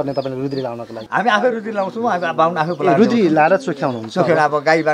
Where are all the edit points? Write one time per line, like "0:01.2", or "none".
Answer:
0:01.0